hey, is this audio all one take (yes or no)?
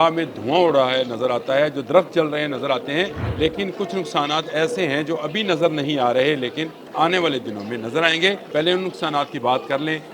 no